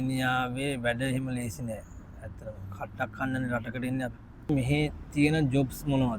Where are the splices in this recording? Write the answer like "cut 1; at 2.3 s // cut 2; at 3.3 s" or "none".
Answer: cut 1; at 4.5 s